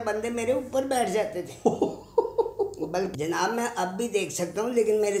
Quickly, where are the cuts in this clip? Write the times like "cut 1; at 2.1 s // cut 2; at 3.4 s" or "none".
cut 1; at 3.1 s